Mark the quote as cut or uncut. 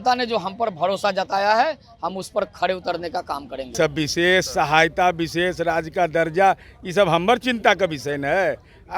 cut